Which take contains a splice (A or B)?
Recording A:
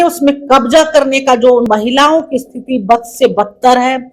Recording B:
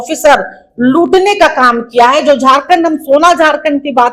A